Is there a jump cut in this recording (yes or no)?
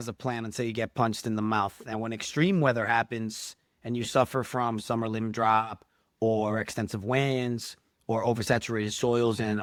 no